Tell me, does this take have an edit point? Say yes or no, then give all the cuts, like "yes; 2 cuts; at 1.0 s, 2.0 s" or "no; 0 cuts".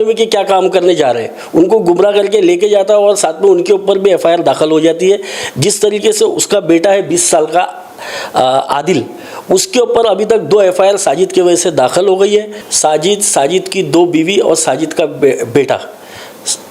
yes; 1 cut; at 12.6 s